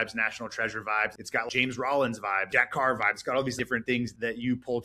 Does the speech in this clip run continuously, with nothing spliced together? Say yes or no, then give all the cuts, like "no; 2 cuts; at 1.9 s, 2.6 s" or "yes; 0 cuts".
no; 3 cuts; at 1.4 s, 2.5 s, 4.0 s